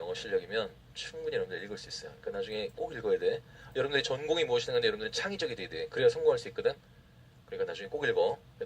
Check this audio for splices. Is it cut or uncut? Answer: cut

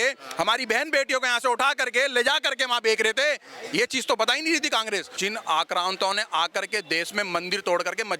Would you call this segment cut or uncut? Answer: cut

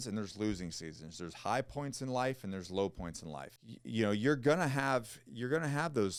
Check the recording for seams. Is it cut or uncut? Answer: uncut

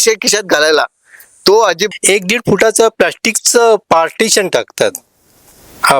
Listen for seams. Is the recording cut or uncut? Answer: cut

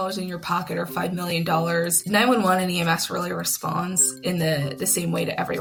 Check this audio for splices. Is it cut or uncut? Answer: uncut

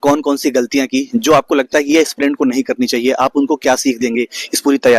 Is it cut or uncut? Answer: uncut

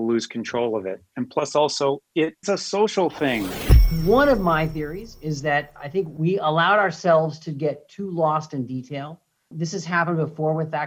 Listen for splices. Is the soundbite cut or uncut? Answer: cut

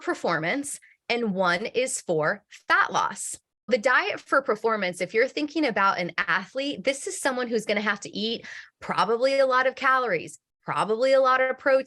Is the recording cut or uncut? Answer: cut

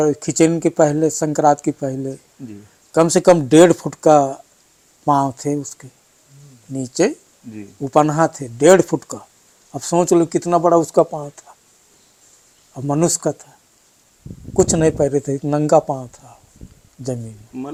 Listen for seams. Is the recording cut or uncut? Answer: uncut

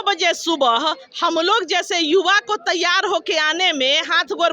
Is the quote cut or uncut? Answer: uncut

